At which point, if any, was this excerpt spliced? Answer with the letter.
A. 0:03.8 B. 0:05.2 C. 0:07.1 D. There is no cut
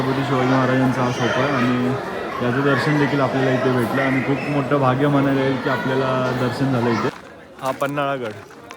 C